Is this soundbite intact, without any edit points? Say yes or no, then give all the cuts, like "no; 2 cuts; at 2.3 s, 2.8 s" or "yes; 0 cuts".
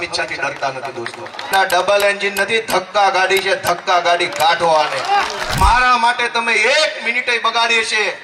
no; 2 cuts; at 1.5 s, 5.5 s